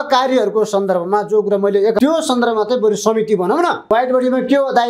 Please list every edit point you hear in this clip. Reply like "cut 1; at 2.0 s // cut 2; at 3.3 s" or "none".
cut 1; at 2.0 s // cut 2; at 3.9 s